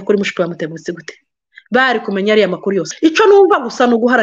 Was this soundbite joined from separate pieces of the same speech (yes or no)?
yes